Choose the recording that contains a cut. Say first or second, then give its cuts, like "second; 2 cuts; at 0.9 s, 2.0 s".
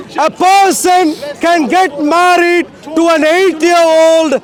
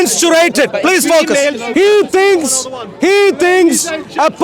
second; 1 cut; at 1.6 s